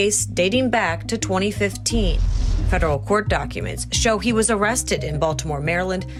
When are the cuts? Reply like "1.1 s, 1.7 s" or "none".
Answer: none